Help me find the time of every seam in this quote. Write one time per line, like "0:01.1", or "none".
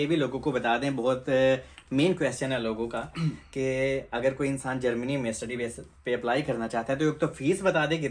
none